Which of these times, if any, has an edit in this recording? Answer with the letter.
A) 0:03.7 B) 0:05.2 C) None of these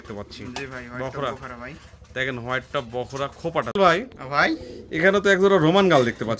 A